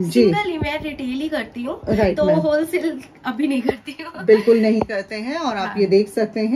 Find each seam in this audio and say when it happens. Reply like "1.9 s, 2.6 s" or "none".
none